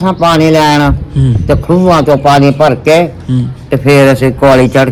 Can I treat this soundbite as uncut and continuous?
yes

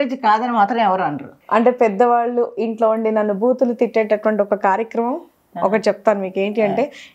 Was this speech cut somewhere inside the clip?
yes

